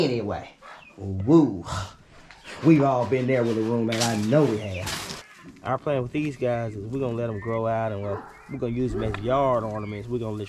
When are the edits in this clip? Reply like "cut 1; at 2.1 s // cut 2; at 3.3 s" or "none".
cut 1; at 5.2 s